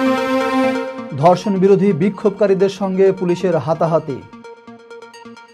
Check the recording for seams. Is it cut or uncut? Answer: cut